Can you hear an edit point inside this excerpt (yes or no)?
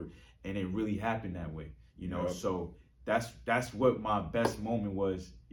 no